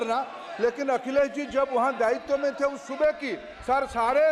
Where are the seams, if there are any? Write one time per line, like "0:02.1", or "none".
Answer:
none